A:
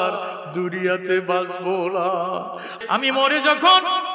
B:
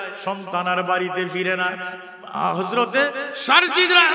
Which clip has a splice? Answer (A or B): A